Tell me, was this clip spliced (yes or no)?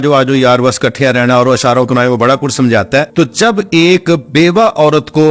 yes